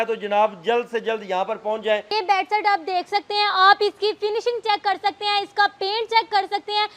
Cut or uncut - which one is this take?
cut